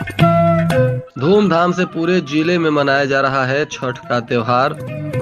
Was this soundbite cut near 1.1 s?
yes; 1 cut; at 1.1 s

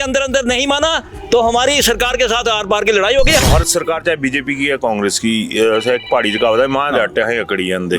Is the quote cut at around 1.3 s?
no; 1 cut; at 3.4 s

